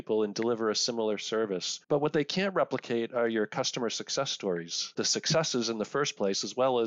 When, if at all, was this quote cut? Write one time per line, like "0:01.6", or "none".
0:01.7
0:04.9